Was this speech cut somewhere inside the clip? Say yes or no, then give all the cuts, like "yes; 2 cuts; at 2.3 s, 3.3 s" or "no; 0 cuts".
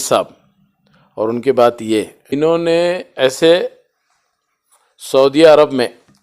yes; 1 cut; at 2.3 s